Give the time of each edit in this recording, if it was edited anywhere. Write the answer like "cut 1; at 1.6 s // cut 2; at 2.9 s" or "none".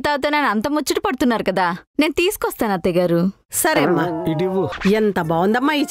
cut 1; at 4.7 s